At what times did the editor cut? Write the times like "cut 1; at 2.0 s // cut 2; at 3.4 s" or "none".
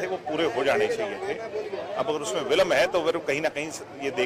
none